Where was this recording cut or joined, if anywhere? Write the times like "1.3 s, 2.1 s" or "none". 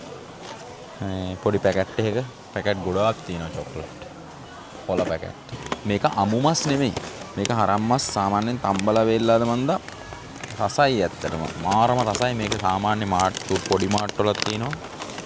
5.5 s